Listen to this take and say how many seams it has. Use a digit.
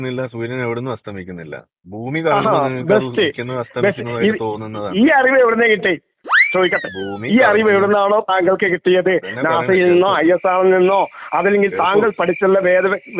0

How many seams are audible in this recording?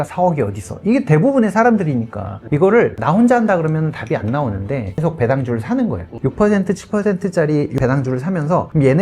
2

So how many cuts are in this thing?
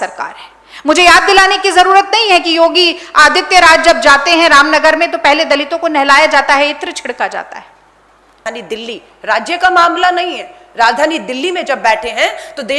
1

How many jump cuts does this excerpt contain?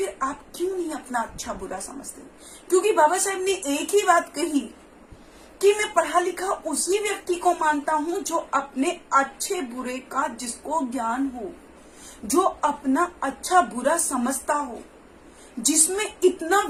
0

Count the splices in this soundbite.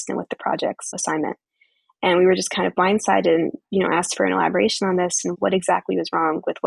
1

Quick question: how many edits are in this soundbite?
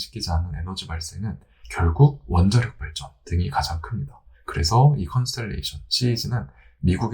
0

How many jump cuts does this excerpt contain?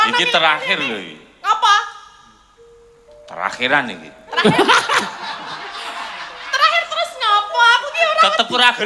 0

